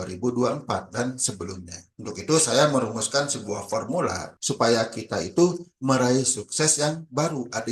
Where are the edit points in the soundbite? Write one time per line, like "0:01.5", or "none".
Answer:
0:04.3